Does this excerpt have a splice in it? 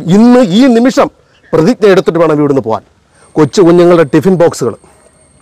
yes; 1 cut; at 3.2 s

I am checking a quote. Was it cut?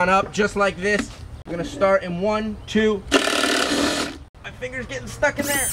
yes; 2 cuts; at 1.4 s, 4.3 s

